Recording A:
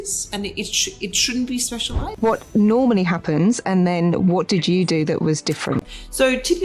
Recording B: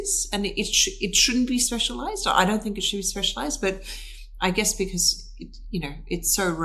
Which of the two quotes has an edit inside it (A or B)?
A